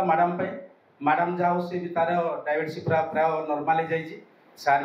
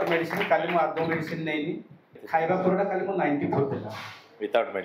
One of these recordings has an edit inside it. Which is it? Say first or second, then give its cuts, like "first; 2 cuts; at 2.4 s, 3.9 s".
second; 1 cut; at 2.2 s